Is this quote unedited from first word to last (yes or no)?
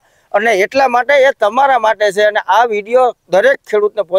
no